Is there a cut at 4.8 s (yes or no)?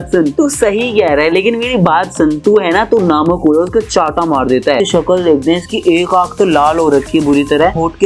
yes